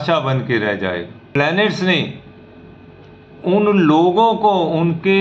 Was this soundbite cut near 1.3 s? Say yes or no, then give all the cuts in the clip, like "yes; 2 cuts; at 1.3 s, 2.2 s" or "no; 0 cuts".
yes; 1 cut; at 1.3 s